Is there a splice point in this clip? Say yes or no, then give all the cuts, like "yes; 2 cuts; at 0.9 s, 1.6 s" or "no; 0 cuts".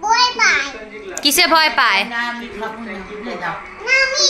no; 0 cuts